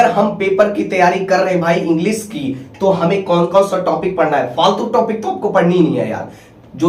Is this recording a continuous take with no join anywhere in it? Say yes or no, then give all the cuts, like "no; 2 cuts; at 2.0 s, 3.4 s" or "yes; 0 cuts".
yes; 0 cuts